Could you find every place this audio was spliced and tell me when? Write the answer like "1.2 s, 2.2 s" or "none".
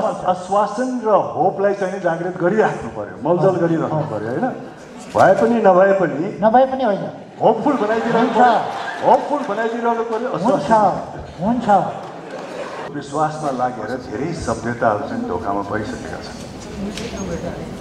12.9 s